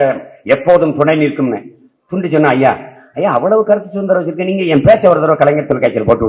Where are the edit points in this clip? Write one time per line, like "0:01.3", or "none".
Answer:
none